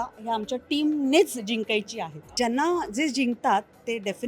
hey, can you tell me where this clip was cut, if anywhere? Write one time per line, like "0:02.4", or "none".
0:02.2